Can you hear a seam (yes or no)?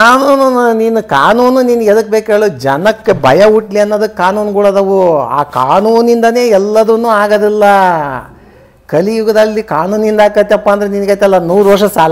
no